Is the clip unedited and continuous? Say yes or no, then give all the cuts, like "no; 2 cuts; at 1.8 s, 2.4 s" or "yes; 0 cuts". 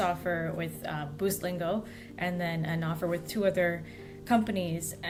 yes; 0 cuts